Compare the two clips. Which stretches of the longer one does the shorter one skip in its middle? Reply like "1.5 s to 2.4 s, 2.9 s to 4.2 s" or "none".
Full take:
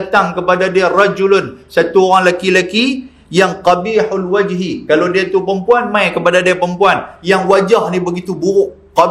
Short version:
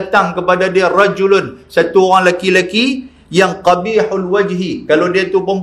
none